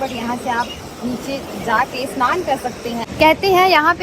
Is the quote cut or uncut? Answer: cut